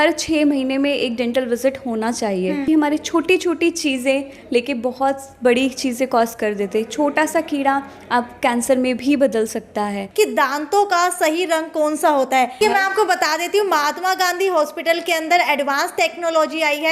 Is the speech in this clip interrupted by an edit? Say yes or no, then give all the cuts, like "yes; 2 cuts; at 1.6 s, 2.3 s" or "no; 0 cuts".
yes; 3 cuts; at 2.6 s, 10.0 s, 12.6 s